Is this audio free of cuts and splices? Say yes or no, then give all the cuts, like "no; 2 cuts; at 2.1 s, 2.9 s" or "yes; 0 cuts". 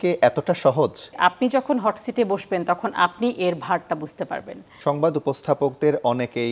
no; 2 cuts; at 1.2 s, 4.6 s